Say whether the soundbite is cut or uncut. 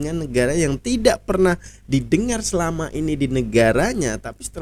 uncut